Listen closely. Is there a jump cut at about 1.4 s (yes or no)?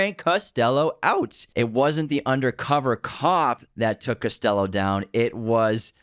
yes